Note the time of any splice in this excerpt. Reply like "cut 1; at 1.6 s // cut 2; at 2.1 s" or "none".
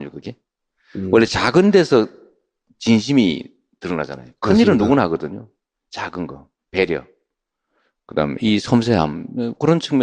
cut 1; at 8.8 s